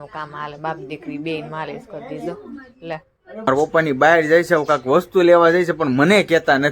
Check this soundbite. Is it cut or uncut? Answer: cut